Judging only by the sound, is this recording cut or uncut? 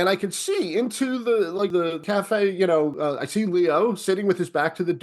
cut